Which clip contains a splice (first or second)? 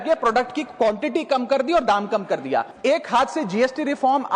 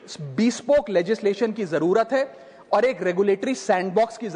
first